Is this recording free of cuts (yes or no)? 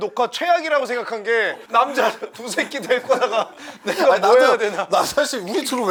yes